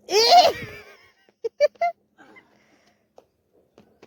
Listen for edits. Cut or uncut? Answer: uncut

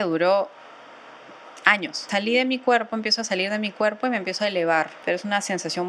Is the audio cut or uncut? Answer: cut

